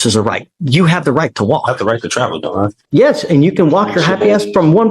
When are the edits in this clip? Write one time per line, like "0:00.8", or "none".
0:02.8